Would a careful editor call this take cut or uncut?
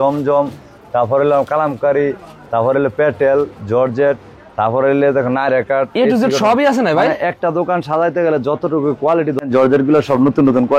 cut